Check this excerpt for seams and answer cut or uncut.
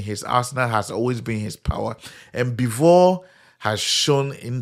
uncut